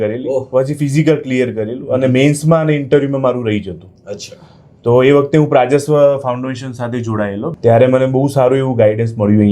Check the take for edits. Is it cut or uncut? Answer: cut